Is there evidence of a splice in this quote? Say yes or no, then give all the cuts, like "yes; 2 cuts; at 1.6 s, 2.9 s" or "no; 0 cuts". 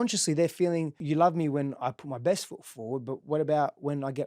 yes; 1 cut; at 1.0 s